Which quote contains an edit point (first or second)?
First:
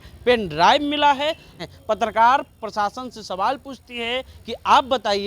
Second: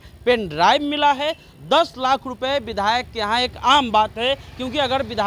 first